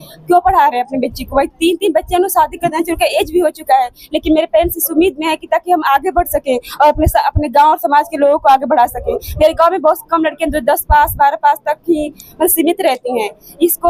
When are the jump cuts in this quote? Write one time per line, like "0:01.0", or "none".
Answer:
none